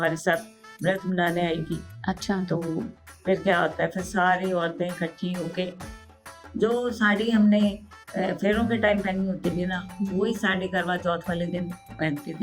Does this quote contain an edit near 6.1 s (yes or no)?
yes